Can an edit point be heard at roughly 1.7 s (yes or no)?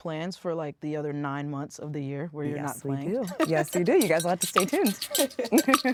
no